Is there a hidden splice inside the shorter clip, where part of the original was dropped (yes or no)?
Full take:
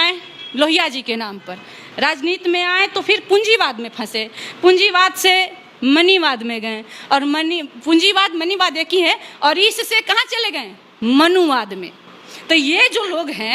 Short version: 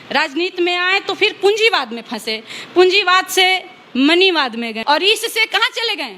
yes